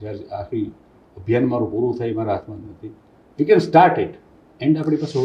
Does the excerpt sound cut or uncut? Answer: uncut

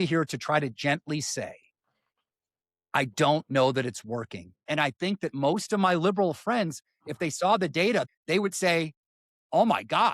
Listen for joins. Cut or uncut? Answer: cut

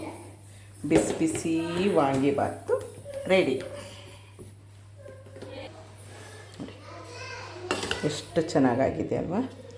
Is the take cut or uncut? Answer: uncut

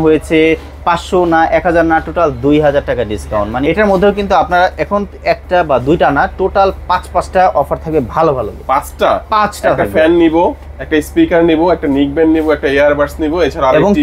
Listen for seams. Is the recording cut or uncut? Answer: cut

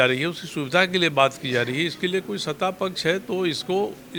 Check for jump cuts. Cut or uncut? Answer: uncut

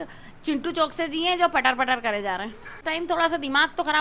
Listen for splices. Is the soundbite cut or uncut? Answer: cut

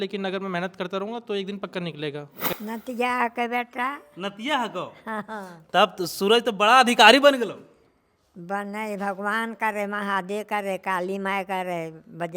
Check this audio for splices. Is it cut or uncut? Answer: cut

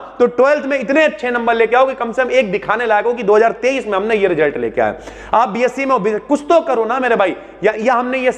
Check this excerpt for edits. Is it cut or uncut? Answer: uncut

